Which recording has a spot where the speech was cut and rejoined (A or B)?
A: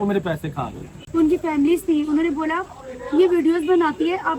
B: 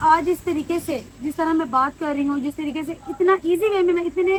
A